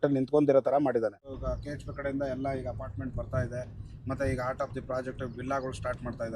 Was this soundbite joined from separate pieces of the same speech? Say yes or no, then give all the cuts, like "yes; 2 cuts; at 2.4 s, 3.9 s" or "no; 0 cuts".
yes; 1 cut; at 1.3 s